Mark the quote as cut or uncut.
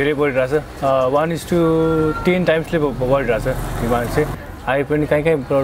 cut